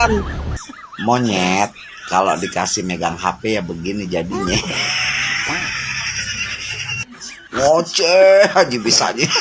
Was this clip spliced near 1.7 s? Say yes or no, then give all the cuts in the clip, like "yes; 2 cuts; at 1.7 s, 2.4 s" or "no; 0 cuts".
no; 0 cuts